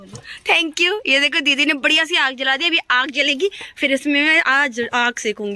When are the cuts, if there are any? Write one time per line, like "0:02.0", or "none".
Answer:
none